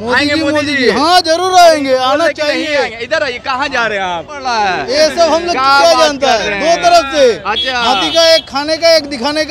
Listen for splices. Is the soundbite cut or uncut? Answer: cut